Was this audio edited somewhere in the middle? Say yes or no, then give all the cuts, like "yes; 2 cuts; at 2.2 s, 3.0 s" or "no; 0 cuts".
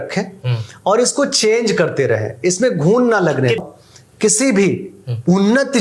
yes; 1 cut; at 3.6 s